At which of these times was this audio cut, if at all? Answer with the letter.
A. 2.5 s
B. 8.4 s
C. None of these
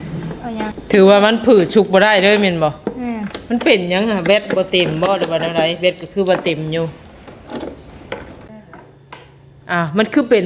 B